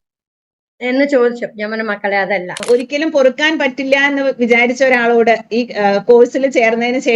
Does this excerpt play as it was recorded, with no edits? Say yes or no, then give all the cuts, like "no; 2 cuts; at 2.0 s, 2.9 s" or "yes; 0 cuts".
no; 1 cut; at 2.6 s